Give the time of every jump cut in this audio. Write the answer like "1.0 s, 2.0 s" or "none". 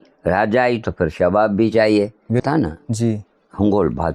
2.3 s